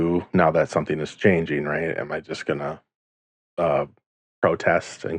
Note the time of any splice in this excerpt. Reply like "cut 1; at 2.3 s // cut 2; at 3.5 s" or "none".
none